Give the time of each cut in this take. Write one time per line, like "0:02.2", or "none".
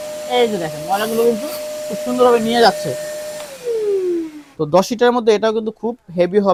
none